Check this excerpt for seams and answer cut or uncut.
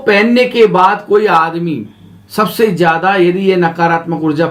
uncut